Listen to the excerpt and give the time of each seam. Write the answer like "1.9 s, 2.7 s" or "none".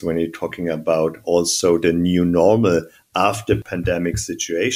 3.6 s